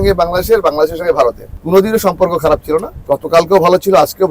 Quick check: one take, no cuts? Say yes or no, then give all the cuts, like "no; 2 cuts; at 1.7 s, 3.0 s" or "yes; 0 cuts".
no; 2 cuts; at 1.5 s, 2.9 s